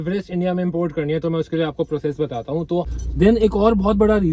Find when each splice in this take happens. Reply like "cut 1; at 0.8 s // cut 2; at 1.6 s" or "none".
cut 1; at 2.9 s